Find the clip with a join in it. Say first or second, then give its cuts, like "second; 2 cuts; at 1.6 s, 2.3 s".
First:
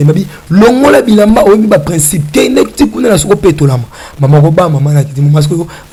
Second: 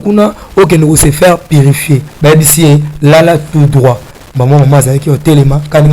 second; 1 cut; at 2.0 s